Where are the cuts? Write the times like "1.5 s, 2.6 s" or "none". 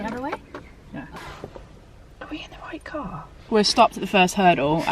1.1 s, 3.4 s

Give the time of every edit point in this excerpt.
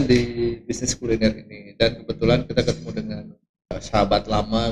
3.8 s

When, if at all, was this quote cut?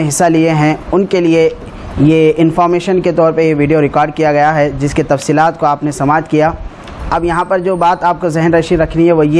none

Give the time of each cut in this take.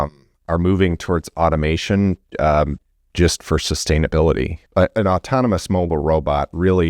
4.6 s

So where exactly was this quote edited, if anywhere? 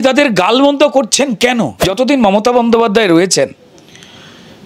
1.9 s

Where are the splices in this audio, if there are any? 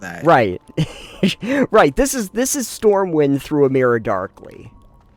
none

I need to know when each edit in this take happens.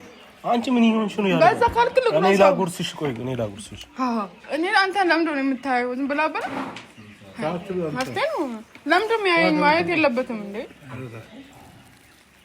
none

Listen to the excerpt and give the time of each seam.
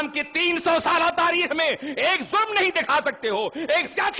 none

